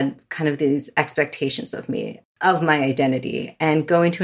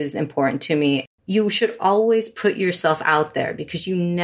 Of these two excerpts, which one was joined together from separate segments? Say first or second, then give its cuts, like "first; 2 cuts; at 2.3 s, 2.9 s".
second; 1 cut; at 1.0 s